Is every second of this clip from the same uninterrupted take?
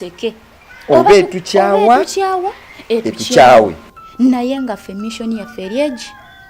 yes; 0 cuts

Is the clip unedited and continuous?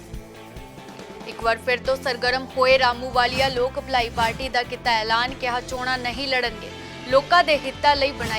no; 1 cut; at 0.9 s

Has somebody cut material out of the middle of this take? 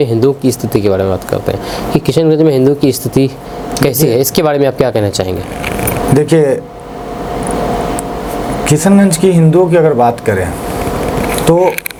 no; 0 cuts

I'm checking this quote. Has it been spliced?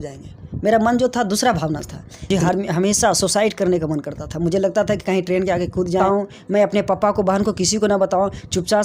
yes; 2 cuts; at 2.3 s, 6.0 s

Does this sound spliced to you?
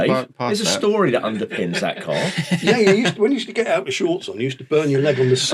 no; 0 cuts

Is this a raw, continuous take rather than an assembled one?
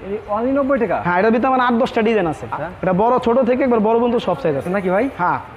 no; 2 cuts; at 2.5 s, 4.7 s

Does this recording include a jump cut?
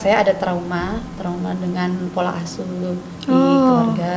no; 0 cuts

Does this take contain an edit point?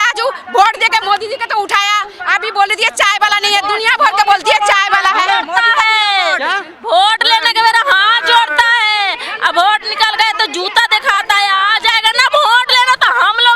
no; 0 cuts

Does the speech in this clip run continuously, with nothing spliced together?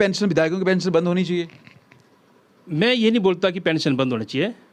yes; 0 cuts

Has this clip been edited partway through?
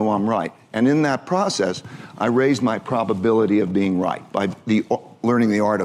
no; 0 cuts

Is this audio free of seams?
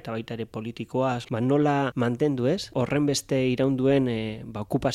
no; 1 cut; at 1.3 s

